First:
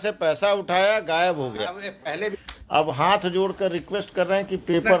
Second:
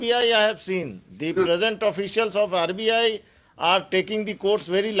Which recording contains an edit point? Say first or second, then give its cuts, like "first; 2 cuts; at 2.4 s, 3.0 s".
first; 1 cut; at 2.4 s